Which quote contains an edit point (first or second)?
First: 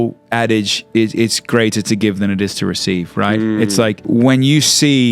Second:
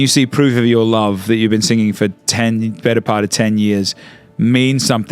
first